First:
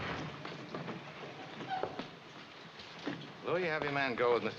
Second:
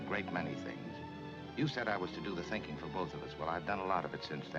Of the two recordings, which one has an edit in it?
second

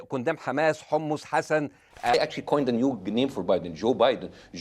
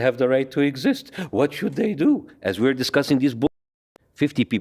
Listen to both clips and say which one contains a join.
first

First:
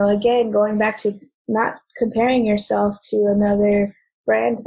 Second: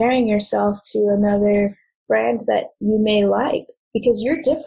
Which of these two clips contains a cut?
second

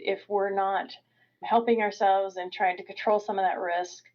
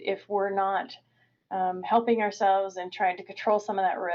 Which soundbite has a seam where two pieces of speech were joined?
first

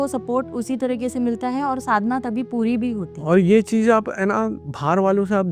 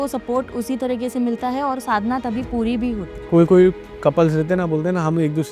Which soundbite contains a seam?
second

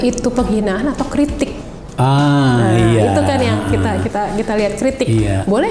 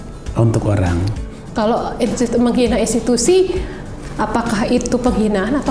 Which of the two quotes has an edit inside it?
second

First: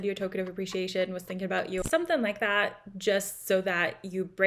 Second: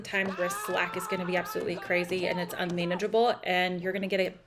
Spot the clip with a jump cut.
first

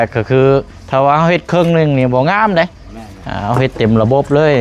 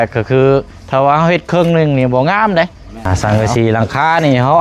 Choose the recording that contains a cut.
second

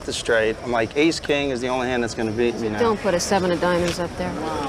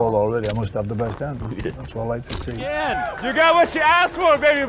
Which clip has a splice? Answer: second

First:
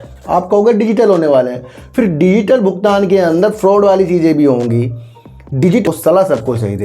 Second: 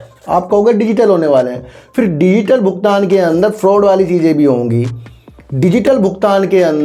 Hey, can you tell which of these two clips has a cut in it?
first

